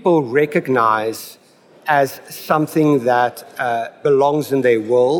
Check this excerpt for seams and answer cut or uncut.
cut